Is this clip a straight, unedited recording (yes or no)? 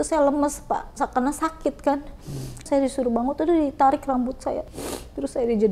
no